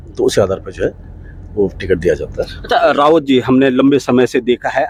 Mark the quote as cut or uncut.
uncut